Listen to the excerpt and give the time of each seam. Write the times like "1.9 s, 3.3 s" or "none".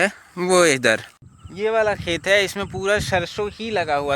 1.1 s